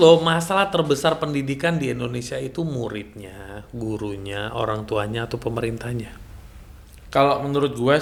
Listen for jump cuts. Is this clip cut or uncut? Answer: uncut